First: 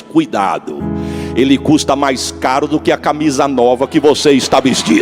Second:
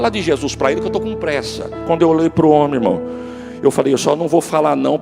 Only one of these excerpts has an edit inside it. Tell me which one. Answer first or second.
second